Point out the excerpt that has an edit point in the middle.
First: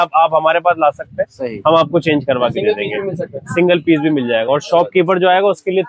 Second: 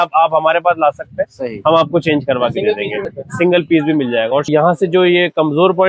second; 2 cuts; at 3.1 s, 4.5 s

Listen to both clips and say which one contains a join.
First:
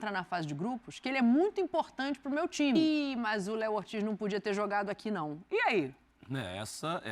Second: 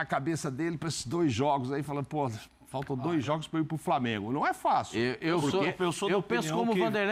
first; 1 cut; at 2.8 s

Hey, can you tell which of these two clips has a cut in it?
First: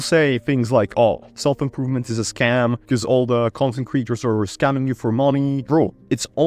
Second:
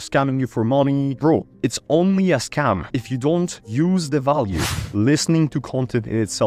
second; 1 cut; at 4.7 s

